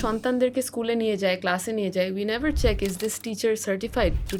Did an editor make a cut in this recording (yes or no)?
no